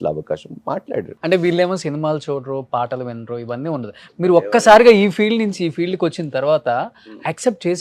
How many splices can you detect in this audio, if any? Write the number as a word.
two